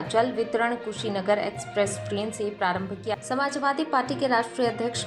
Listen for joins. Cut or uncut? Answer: cut